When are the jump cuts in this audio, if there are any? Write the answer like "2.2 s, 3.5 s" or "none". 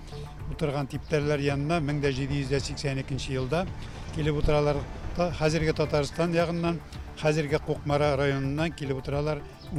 none